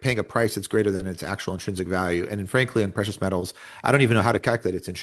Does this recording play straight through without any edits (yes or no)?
yes